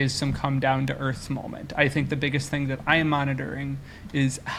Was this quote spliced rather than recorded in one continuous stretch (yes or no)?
no